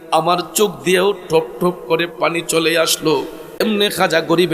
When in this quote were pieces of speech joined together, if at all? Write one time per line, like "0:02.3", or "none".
0:03.6